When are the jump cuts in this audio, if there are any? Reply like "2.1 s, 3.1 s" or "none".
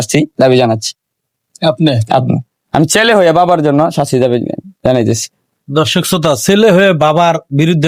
none